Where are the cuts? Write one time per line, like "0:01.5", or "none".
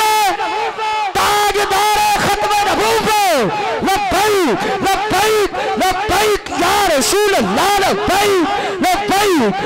none